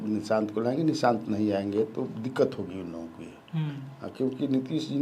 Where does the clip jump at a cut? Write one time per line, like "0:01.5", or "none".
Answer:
none